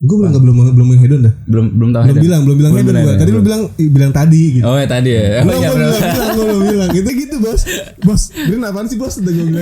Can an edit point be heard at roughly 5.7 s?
no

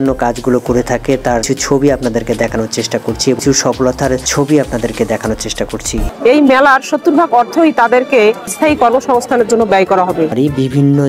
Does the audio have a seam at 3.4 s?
yes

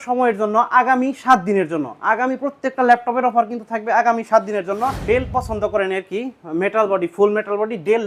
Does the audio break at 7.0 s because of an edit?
no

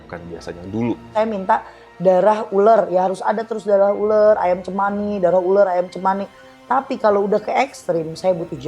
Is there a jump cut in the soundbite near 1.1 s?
yes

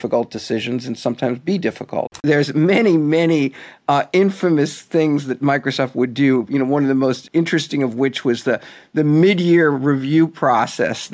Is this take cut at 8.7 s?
no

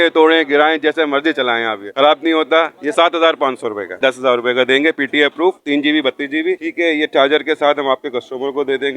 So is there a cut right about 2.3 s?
no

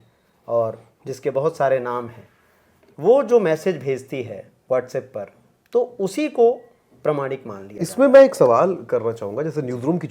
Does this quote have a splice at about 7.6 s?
yes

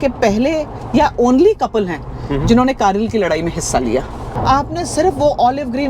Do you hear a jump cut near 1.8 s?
no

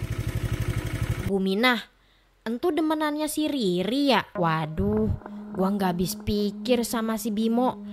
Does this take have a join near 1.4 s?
no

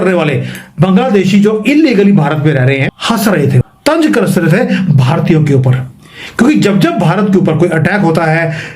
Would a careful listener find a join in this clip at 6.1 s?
no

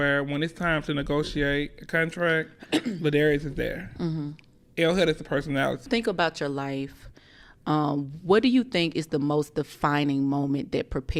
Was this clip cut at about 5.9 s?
yes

